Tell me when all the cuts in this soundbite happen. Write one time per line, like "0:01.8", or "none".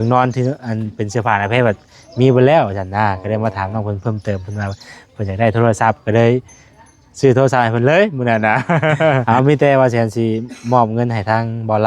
0:09.2